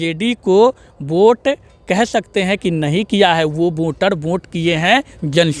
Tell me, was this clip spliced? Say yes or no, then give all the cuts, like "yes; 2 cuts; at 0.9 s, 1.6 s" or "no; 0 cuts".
no; 0 cuts